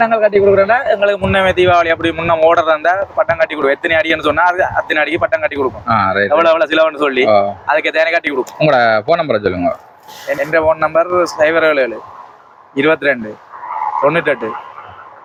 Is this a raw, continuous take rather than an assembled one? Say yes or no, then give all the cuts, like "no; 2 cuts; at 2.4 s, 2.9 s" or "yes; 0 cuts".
yes; 0 cuts